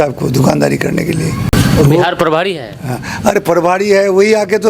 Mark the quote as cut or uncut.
cut